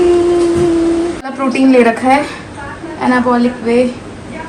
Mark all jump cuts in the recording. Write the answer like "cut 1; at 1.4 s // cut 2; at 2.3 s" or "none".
cut 1; at 1.3 s